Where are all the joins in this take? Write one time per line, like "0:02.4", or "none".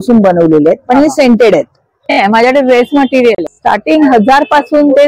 0:02.2
0:03.5